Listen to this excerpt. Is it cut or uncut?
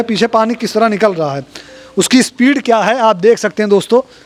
uncut